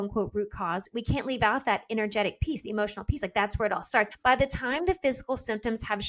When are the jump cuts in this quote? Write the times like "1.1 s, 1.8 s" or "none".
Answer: 0.9 s, 4.1 s